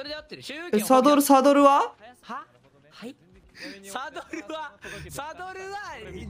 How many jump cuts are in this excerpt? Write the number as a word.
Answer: one